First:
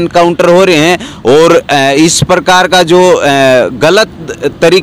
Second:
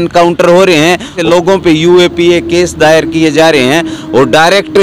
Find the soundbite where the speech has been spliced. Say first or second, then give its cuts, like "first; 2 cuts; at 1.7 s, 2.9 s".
second; 1 cut; at 1.2 s